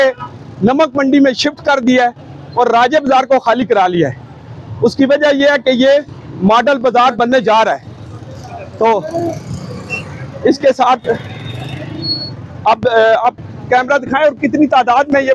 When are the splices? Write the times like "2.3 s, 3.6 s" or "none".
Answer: none